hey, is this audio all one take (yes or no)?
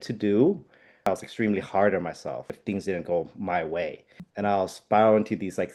no